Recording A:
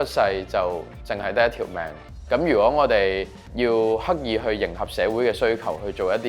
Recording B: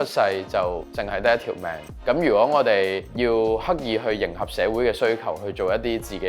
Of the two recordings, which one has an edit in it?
B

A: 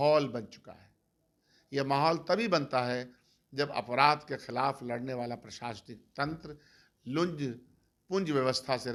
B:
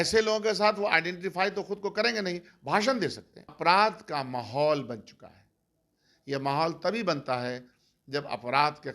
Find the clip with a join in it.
B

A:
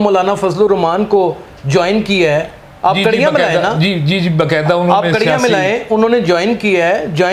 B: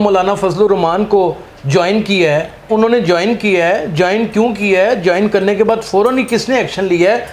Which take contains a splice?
B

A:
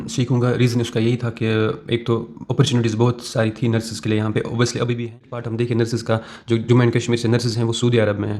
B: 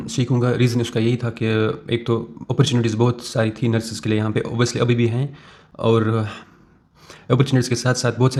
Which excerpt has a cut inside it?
A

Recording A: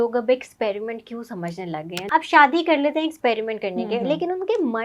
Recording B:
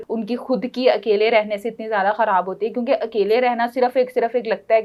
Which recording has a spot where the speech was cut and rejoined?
A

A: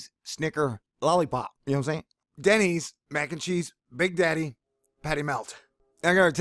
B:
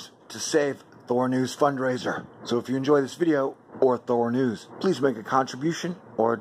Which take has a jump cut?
A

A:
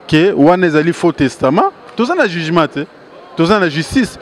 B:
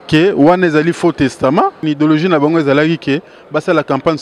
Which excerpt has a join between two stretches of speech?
B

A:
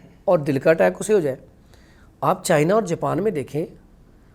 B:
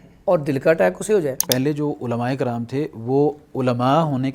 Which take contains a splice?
B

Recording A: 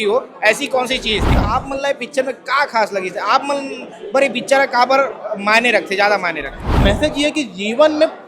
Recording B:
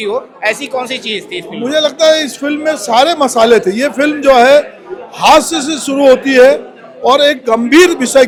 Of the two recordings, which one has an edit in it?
A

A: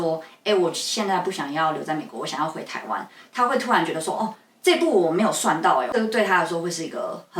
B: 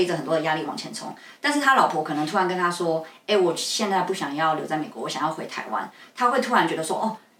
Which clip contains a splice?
A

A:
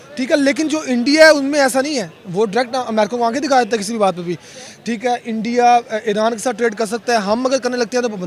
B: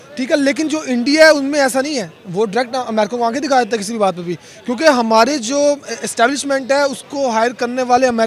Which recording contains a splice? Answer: A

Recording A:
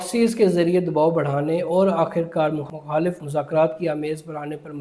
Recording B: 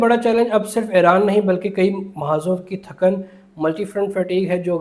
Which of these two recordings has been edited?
A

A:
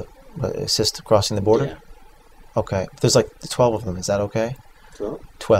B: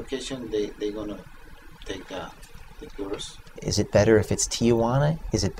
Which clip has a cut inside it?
B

